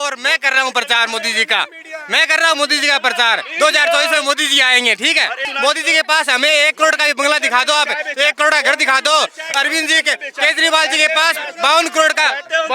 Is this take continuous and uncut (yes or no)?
no